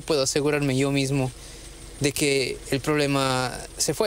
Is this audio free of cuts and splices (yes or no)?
yes